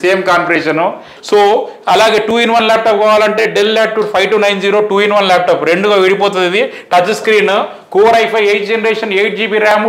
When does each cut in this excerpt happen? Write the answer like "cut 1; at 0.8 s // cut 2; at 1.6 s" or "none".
cut 1; at 1.1 s